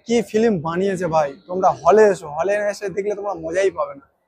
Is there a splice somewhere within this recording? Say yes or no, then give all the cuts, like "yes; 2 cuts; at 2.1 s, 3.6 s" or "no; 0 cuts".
no; 0 cuts